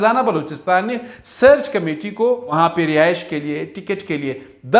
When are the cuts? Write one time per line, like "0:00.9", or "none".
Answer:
0:02.5